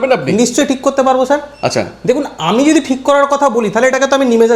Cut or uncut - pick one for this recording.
uncut